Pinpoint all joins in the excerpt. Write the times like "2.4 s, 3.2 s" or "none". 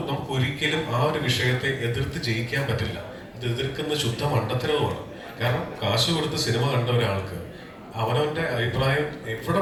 none